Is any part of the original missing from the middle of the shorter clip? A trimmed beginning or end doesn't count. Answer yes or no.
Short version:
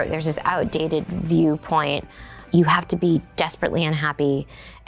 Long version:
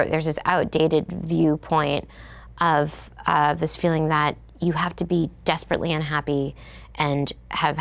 yes